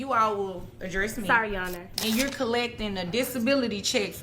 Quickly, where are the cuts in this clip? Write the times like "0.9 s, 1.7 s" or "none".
1.9 s